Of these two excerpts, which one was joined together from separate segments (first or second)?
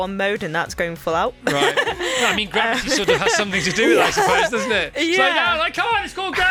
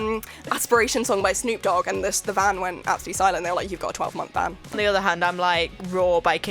second